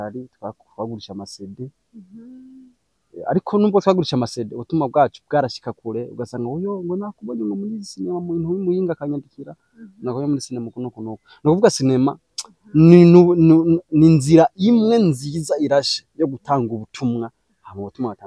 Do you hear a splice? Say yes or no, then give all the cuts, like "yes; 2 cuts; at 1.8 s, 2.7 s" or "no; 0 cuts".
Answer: no; 0 cuts